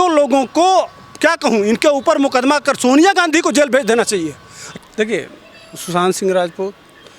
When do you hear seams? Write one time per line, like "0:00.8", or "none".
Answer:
0:04.7